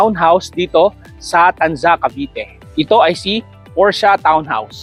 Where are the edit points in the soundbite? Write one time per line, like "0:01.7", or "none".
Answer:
none